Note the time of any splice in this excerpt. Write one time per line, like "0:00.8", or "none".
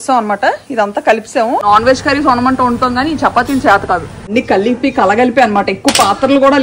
0:01.6
0:04.3